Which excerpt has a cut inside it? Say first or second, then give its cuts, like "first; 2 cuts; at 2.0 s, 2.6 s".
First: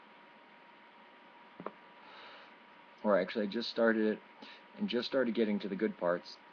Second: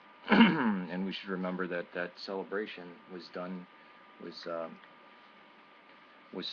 second; 1 cut; at 5.6 s